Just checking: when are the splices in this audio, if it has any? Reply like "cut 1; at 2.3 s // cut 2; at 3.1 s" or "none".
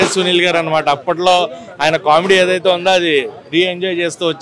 none